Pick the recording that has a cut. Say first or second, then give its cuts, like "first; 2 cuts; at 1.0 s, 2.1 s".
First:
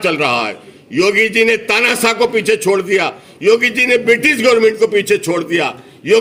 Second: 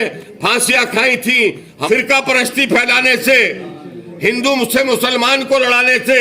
second; 1 cut; at 1.7 s